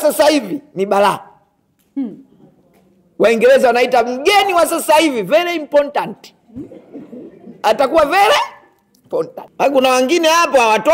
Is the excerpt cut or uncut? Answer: cut